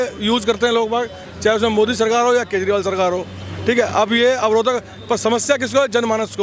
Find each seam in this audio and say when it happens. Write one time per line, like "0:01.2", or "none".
none